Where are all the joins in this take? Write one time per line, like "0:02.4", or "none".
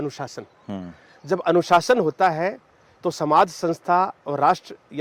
none